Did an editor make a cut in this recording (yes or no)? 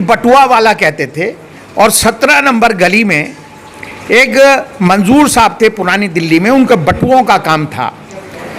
no